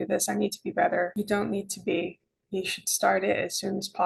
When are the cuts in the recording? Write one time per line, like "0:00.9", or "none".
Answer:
none